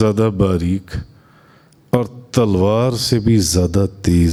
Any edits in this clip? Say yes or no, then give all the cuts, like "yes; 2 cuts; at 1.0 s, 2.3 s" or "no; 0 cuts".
no; 0 cuts